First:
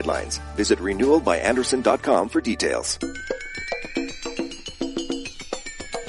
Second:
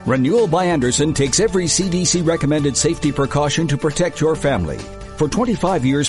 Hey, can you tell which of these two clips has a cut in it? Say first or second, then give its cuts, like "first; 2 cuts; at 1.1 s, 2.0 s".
first; 1 cut; at 2.9 s